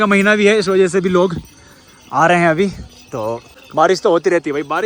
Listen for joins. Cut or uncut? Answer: uncut